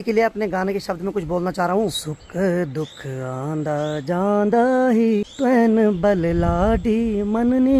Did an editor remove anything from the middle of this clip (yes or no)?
yes